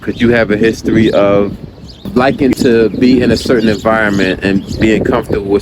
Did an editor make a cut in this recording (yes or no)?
yes